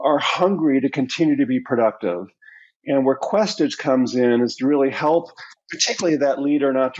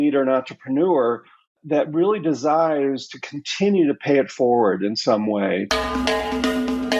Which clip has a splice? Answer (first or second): second